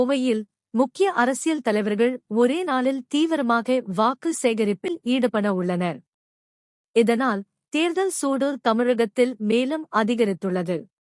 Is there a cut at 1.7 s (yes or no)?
no